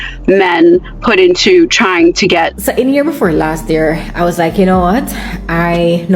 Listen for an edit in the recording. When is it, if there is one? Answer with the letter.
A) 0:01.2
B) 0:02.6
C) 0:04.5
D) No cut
B